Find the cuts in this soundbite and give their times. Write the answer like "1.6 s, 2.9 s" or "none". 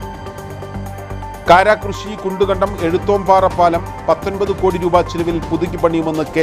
1.2 s